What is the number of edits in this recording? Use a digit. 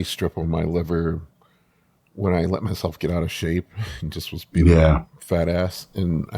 0